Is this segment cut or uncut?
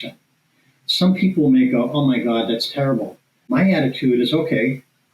cut